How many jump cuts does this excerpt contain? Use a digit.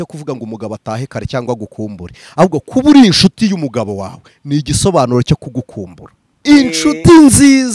1